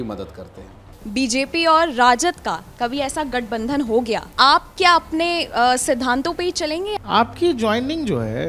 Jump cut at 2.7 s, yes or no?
no